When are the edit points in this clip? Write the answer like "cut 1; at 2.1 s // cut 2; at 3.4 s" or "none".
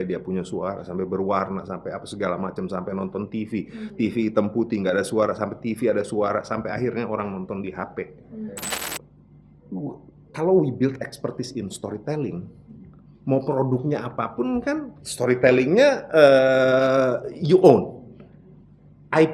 cut 1; at 8.9 s